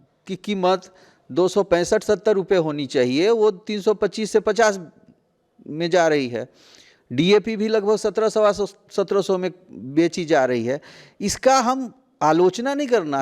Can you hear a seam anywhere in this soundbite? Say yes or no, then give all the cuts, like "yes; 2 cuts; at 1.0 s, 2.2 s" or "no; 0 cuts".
no; 0 cuts